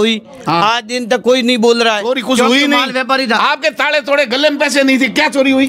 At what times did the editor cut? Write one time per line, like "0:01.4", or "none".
none